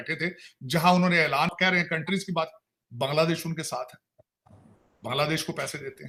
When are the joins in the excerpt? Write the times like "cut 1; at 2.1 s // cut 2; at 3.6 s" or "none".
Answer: none